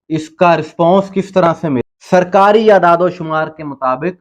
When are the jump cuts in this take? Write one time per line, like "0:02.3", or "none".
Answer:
0:01.8